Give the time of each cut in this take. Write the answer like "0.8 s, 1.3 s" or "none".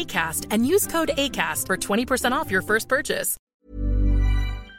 3.3 s